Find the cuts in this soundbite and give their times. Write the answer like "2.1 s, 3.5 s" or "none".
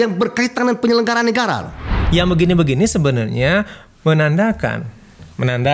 1.9 s